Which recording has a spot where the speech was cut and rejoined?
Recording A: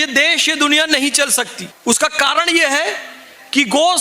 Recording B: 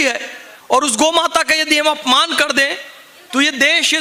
A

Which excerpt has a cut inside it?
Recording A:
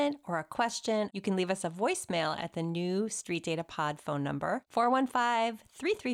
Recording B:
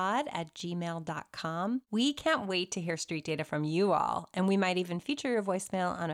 A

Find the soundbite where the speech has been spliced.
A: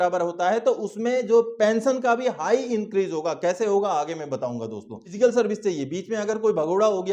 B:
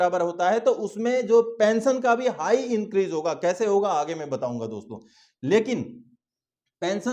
A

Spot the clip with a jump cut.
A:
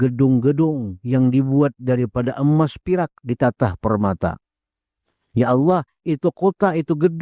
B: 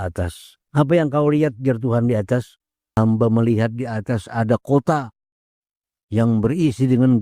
B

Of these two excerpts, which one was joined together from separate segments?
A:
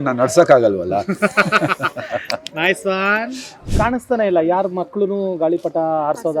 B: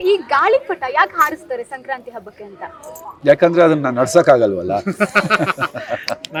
A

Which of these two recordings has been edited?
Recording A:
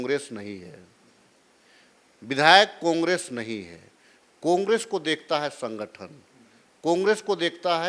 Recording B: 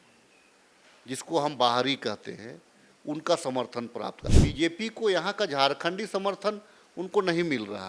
B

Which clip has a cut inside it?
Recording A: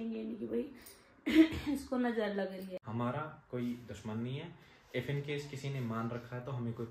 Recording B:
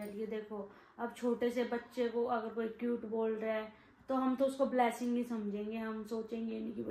A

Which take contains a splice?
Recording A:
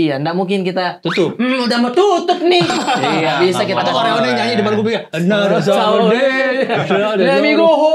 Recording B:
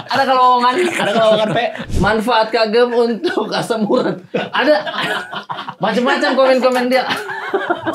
B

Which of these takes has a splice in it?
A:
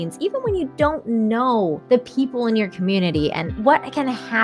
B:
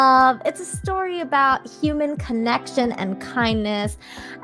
A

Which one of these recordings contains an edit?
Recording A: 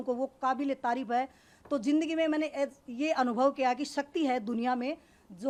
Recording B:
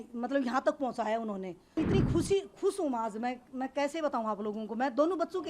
B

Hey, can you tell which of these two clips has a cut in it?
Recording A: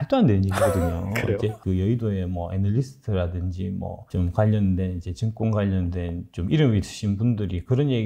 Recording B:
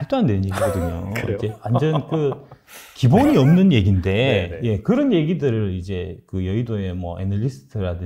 A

